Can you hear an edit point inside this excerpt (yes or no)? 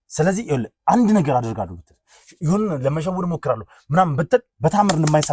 no